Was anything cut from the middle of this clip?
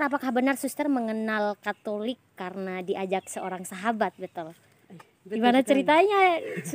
no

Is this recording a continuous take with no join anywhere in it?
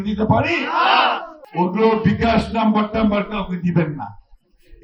no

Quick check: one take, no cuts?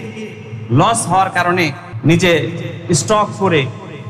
no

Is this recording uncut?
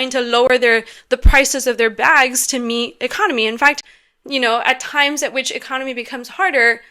yes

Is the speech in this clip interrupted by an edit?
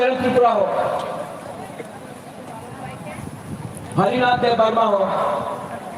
yes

